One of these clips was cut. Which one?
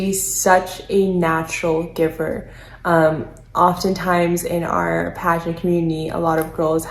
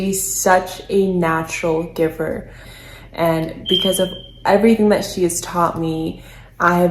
second; 1 cut; at 2.7 s

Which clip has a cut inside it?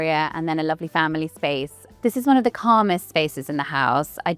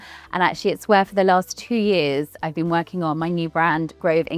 first; 1 cut; at 1.8 s

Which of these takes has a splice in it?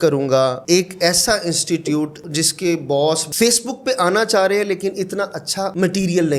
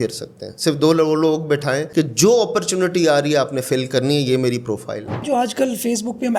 second; 1 cut; at 5.2 s

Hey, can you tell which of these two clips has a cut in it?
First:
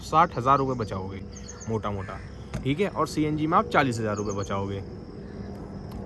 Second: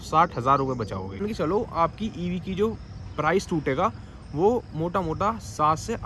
second; 1 cut; at 1.2 s

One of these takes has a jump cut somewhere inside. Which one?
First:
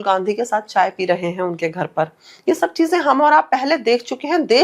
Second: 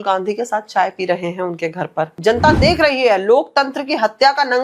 second; 1 cut; at 2.1 s

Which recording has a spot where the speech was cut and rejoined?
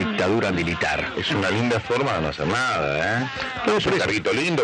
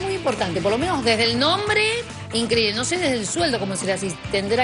first; 1 cut; at 1.0 s

